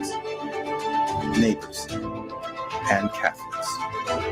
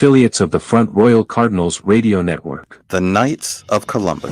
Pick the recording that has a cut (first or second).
second